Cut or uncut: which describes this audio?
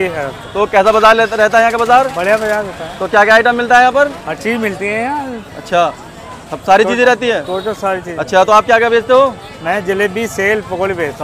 uncut